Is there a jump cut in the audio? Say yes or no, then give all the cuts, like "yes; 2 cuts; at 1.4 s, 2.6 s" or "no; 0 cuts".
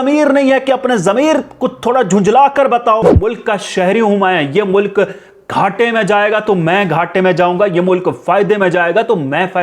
yes; 1 cut; at 3.0 s